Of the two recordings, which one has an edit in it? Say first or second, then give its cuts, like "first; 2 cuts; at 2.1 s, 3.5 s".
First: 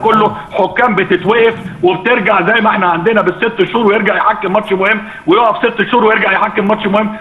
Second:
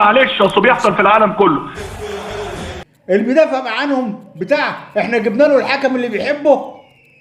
second; 2 cuts; at 1.7 s, 2.9 s